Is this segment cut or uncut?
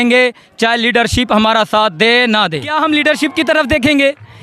cut